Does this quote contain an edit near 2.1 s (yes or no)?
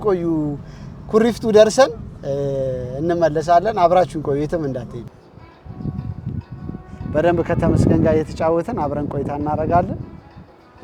no